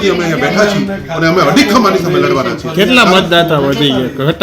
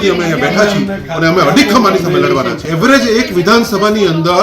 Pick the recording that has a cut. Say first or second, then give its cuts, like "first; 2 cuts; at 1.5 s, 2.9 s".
second; 1 cut; at 2.6 s